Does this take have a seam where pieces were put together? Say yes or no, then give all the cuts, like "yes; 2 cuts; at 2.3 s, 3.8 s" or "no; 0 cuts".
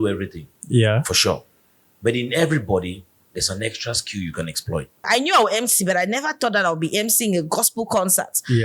yes; 1 cut; at 5.0 s